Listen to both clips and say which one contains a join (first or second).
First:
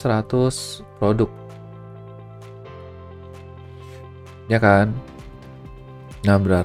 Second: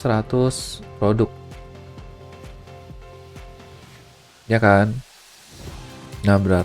second